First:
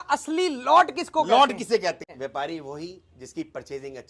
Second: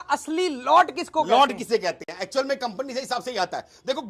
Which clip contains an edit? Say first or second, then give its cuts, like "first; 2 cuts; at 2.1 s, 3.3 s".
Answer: first; 1 cut; at 2.1 s